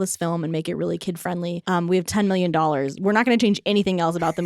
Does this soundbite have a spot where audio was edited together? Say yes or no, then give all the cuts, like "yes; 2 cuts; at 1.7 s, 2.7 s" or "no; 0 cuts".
yes; 1 cut; at 1.6 s